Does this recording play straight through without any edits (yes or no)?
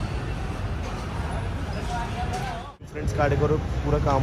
no